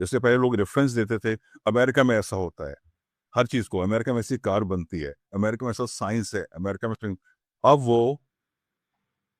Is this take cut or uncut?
uncut